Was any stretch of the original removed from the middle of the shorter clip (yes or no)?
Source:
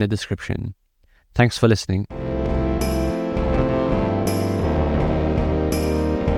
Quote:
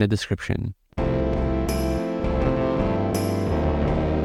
yes